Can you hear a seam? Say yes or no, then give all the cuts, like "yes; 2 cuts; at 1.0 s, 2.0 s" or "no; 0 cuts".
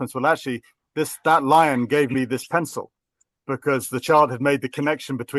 no; 0 cuts